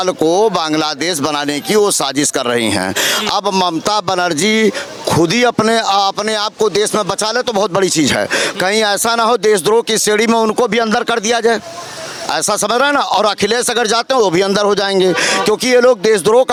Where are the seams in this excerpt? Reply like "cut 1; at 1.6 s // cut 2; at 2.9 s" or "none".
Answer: none